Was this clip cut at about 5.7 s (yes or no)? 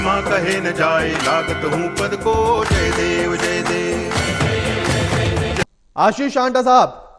yes